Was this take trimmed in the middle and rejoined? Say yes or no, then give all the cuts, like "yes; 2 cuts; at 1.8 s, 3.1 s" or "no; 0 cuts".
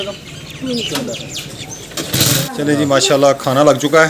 yes; 1 cut; at 2.4 s